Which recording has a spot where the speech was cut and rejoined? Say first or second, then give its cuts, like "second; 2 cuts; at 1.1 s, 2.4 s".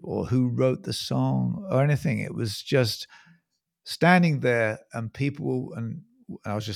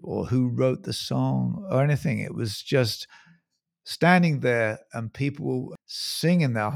second; 1 cut; at 5.8 s